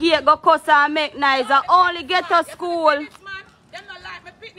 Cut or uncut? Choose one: uncut